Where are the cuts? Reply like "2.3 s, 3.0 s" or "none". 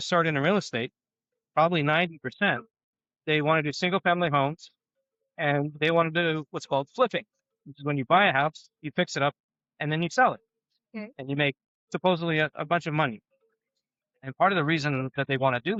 none